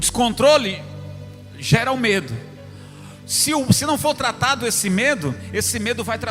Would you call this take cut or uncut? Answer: uncut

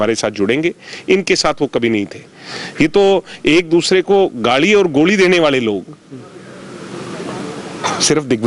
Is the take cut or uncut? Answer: uncut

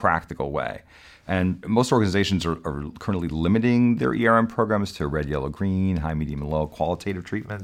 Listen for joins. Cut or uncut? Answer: uncut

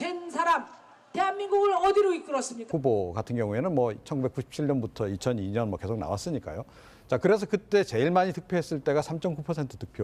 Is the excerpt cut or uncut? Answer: uncut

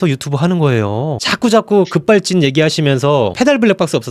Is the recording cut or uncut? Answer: cut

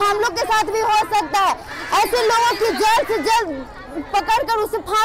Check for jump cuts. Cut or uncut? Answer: uncut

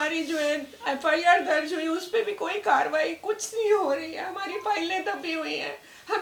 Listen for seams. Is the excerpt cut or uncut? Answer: uncut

